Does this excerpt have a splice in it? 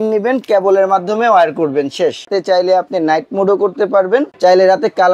yes; 2 cuts; at 2.3 s, 4.3 s

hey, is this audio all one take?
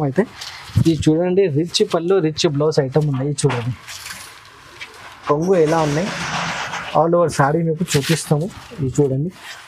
yes; 0 cuts

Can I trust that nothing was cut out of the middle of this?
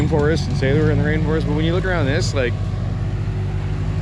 yes; 0 cuts

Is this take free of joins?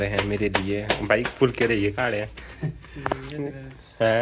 yes; 0 cuts

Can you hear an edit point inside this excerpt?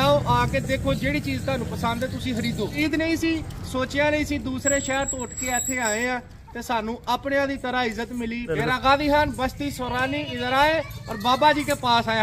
yes; 2 cuts; at 2.8 s, 8.5 s

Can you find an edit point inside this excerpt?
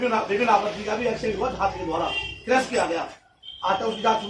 no; 0 cuts

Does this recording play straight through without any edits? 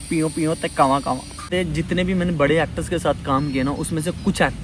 no; 1 cut; at 1.5 s

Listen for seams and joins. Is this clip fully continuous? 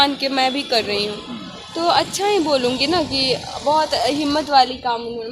yes; 0 cuts

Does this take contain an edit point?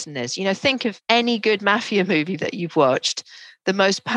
yes; 1 cut; at 1.0 s

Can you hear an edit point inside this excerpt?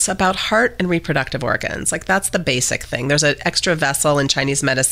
no; 0 cuts

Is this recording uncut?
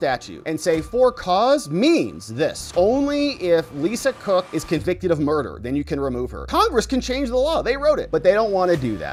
yes; 0 cuts

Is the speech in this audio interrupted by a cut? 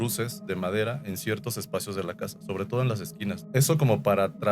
yes; 1 cut; at 3.4 s

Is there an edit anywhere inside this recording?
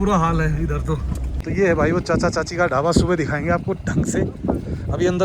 yes; 1 cut; at 1.4 s

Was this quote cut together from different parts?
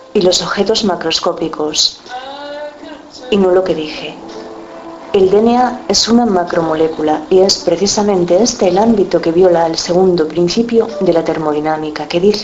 no; 0 cuts

